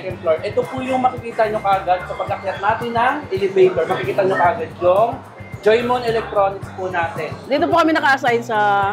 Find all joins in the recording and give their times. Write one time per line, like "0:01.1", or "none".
0:07.4